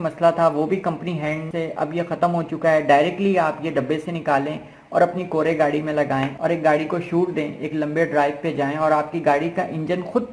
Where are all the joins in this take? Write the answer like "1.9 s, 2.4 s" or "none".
none